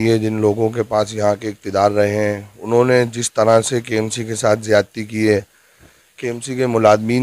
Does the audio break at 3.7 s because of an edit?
no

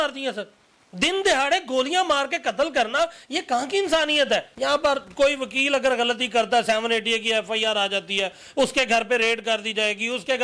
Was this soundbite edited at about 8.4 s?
no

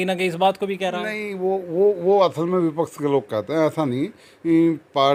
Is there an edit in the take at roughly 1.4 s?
no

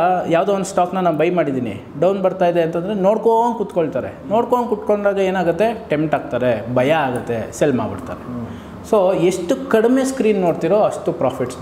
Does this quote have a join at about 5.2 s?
no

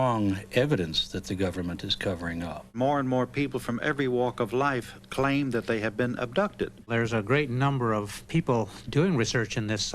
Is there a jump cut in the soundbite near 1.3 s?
no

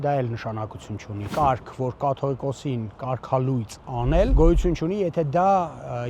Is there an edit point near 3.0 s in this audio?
no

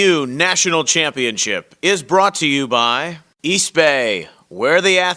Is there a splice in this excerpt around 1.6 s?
no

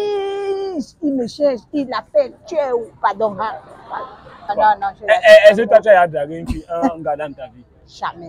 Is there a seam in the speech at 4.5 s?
yes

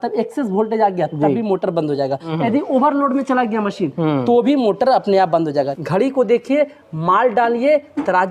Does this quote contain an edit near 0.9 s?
no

